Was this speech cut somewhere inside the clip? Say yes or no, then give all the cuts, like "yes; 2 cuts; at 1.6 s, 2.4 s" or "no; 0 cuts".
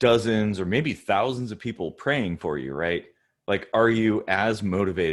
no; 0 cuts